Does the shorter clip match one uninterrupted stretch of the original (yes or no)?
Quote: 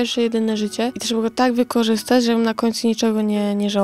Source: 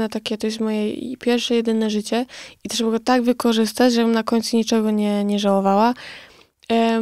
no